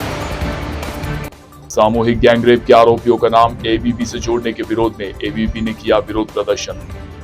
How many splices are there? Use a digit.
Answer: 0